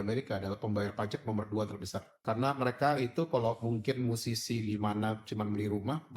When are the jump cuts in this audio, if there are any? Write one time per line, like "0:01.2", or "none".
0:02.0